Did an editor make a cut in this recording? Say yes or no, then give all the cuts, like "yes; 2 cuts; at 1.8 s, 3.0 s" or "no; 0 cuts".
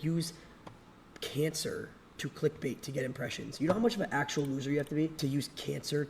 yes; 1 cut; at 5.1 s